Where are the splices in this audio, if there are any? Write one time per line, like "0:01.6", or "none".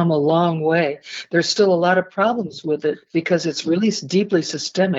0:03.0
0:04.0